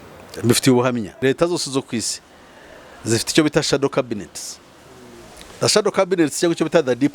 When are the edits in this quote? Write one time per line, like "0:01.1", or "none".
0:01.2